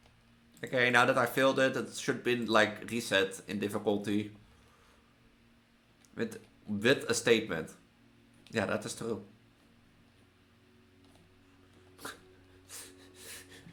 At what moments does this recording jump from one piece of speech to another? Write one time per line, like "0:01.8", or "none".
none